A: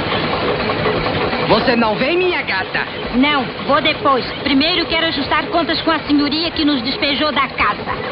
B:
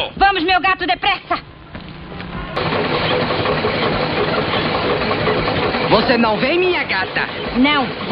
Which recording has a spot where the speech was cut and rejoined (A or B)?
B